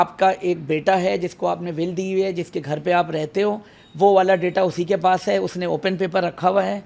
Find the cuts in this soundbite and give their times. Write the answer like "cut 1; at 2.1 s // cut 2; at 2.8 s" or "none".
none